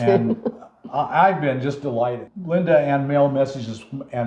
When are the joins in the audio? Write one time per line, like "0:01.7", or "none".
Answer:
0:02.3